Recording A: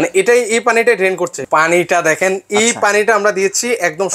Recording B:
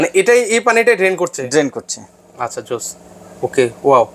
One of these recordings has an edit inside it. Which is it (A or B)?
A